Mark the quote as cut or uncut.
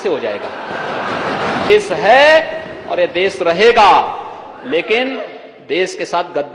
cut